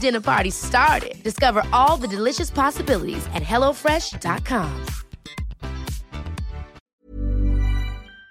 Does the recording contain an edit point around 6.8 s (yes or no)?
yes